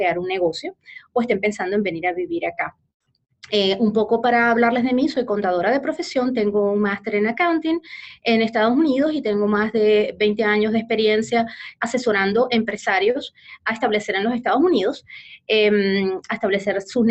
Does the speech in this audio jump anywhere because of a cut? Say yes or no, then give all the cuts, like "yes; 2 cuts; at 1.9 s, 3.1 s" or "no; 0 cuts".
no; 0 cuts